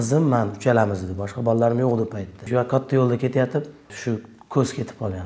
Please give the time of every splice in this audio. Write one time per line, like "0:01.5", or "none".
0:02.4
0:03.8